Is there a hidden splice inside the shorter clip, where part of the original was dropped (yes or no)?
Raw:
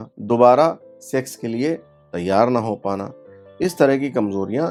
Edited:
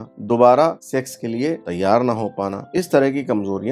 yes